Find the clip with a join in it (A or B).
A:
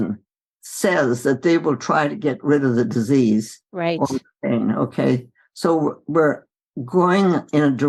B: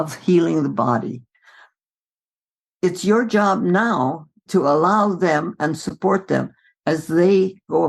B